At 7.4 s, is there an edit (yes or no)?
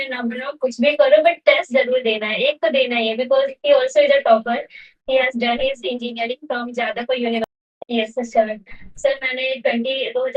yes